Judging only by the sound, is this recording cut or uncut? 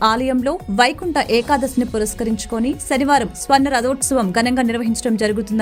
uncut